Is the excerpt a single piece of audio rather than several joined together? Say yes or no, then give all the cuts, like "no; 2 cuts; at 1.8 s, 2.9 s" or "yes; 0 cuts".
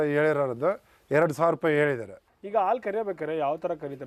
yes; 0 cuts